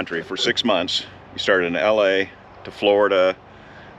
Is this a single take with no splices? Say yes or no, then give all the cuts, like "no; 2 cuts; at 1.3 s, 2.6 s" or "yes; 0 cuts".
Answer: yes; 0 cuts